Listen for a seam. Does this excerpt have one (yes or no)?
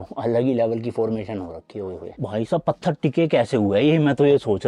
yes